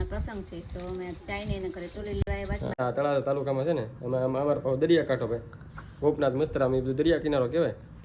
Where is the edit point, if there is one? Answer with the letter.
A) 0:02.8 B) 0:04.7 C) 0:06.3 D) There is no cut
A